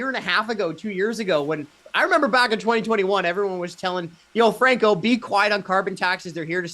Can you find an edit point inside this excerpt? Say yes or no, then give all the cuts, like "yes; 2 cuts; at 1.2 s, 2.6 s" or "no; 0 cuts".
yes; 1 cut; at 1.8 s